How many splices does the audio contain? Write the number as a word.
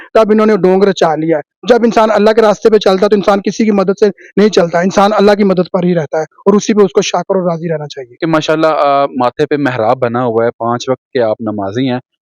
one